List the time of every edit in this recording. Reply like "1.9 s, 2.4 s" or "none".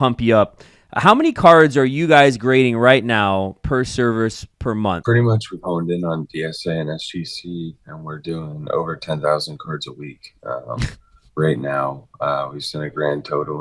5.0 s